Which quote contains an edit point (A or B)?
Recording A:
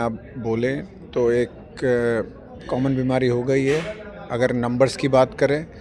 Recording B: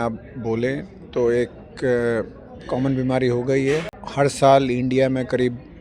B